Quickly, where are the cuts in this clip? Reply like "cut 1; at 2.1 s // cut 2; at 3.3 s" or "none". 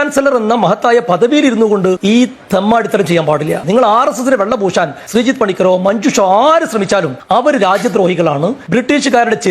cut 1; at 2.0 s // cut 2; at 5.0 s // cut 3; at 7.2 s // cut 4; at 8.6 s